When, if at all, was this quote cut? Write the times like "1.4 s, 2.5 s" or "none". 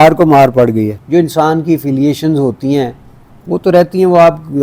1.0 s